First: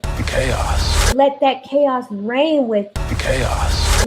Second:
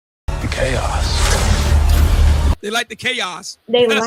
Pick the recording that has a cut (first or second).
first